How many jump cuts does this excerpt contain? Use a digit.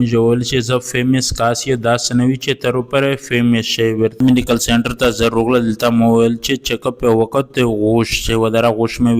1